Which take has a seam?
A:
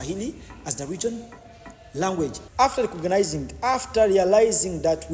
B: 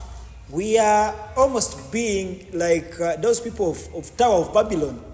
A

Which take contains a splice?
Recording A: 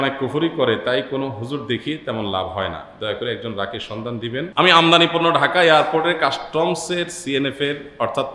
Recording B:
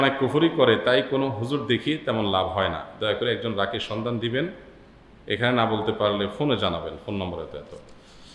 A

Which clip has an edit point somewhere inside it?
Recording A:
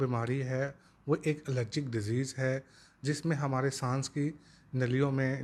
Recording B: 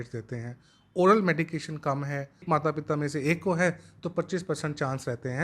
B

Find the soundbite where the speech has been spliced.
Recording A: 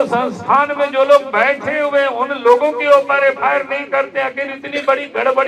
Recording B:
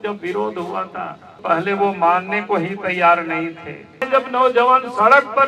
B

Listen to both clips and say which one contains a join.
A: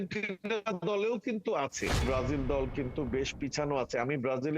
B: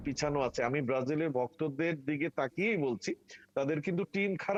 A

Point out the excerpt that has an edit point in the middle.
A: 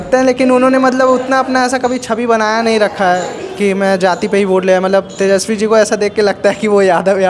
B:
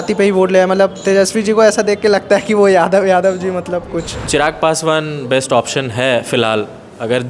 B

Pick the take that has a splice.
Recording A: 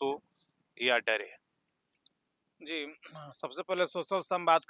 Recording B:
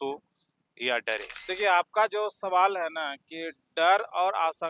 B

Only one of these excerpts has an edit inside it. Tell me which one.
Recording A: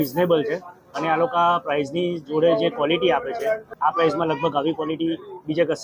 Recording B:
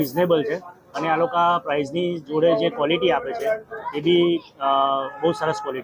A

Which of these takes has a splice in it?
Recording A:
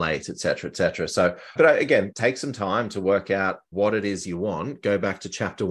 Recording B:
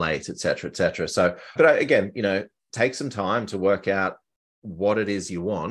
A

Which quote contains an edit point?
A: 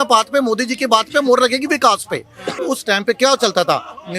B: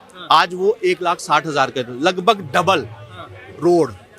A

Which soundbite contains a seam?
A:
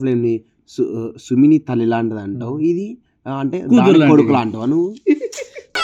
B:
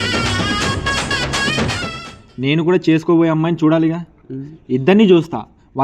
B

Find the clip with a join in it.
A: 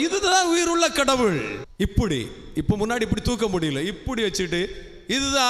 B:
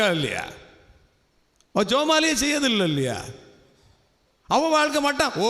A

